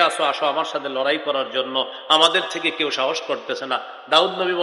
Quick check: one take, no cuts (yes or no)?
yes